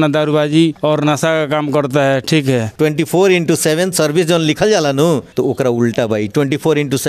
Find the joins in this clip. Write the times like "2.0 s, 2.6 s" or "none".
2.7 s